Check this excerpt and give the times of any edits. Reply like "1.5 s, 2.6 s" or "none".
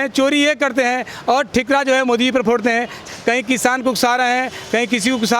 3.0 s